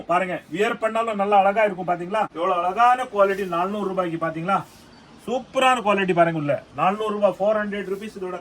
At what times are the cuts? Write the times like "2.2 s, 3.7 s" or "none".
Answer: 2.3 s